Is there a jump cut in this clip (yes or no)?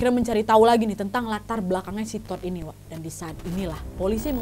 yes